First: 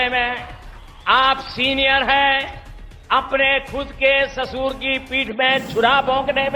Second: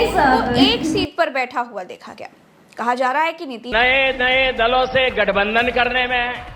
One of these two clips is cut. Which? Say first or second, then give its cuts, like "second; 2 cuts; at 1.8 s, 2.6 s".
second; 1 cut; at 3.6 s